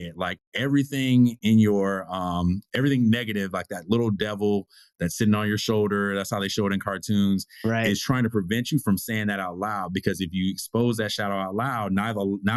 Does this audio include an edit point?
no; 0 cuts

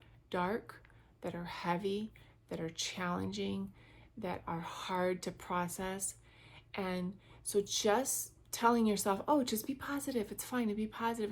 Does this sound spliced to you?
no; 0 cuts

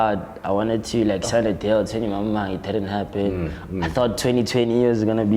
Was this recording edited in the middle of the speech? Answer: no; 0 cuts

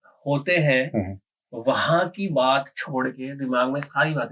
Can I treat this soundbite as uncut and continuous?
yes; 0 cuts

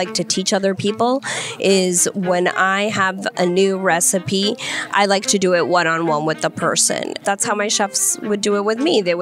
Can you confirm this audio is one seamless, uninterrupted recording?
no; 1 cut; at 7.2 s

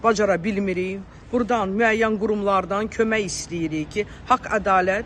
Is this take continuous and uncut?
yes; 0 cuts

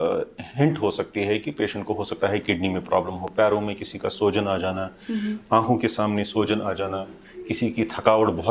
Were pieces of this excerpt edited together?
no; 0 cuts

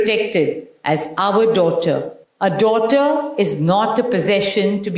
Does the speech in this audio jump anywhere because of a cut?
yes; 1 cut; at 2.2 s

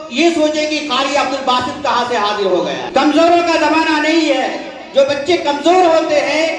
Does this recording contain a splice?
yes; 1 cut; at 2.8 s

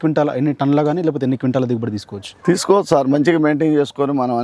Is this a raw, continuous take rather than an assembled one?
yes; 0 cuts

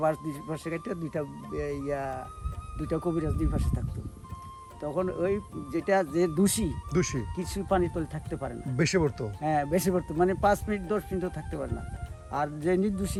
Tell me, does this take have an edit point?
no; 0 cuts

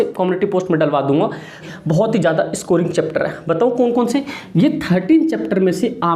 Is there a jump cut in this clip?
yes; 1 cut; at 1.6 s

